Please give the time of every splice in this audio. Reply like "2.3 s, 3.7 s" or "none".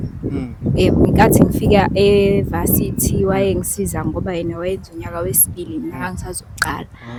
none